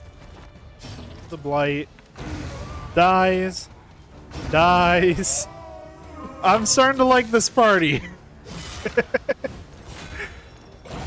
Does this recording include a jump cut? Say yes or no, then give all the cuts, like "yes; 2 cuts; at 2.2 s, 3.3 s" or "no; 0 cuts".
yes; 1 cut; at 1.3 s